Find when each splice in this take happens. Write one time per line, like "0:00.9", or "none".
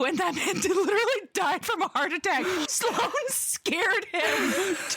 0:02.7